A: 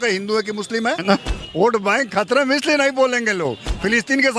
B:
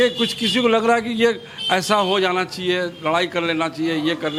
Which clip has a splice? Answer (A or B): A